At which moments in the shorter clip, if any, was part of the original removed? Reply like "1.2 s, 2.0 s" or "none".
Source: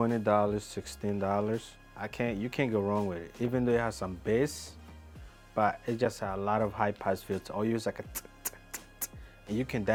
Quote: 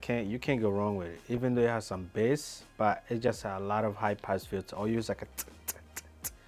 2.6 s